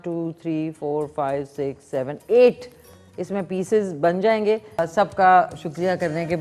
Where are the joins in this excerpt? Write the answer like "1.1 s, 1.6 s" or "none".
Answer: 4.9 s